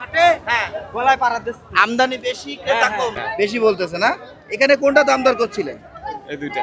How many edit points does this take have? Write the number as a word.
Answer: one